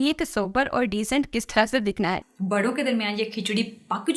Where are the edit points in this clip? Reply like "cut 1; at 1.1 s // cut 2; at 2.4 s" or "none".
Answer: cut 1; at 2.3 s